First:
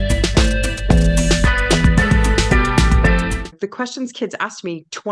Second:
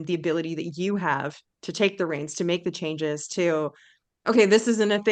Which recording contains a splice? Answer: first; 2 cuts; at 1.3 s, 3.4 s

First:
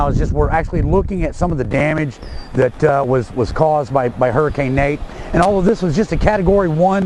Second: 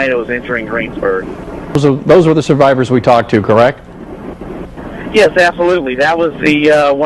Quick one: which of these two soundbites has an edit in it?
second; 1 cut; at 1.8 s

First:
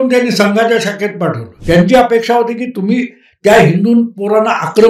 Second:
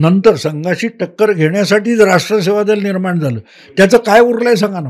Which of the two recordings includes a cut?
first; 1 cut; at 1.5 s

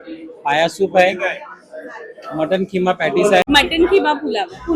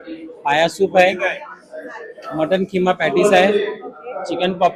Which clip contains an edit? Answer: first; 1 cut; at 3.4 s

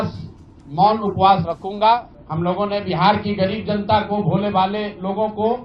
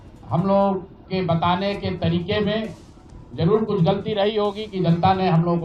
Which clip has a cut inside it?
first; 1 cut; at 2.1 s

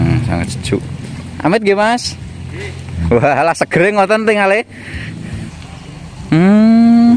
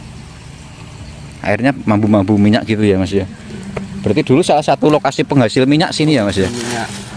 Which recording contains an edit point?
first; 1 cut; at 5.6 s

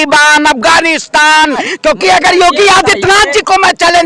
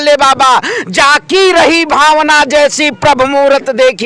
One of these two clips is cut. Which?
first; 1 cut; at 1.7 s

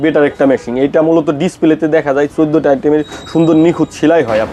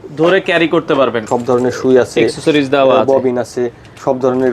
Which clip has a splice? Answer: second; 1 cut; at 1.2 s

